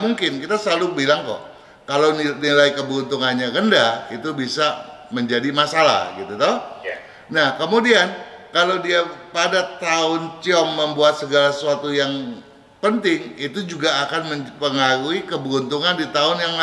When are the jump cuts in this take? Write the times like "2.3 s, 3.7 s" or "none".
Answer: none